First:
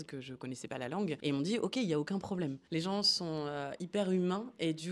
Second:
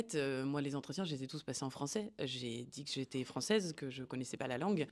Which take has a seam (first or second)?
first